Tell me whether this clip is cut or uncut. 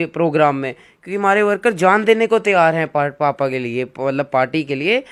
uncut